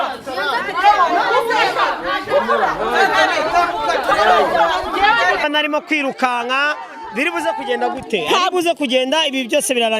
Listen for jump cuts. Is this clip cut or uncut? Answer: cut